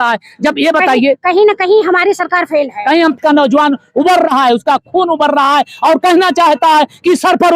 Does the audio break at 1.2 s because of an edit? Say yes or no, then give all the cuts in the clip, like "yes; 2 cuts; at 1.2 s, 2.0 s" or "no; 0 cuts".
no; 1 cut; at 3.2 s